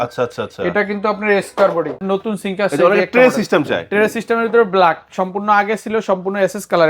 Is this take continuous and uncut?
no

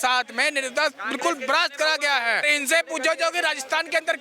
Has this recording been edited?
yes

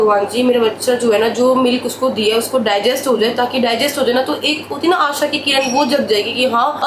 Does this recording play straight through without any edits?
yes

